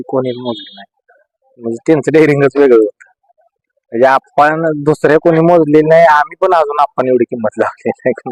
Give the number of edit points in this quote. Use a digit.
0